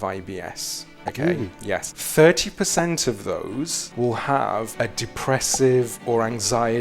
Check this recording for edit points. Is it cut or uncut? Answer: cut